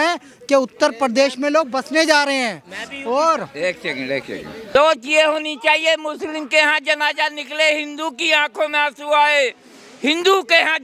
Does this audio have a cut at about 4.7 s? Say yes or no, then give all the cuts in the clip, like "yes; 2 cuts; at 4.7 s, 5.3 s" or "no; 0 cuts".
yes; 1 cut; at 4.7 s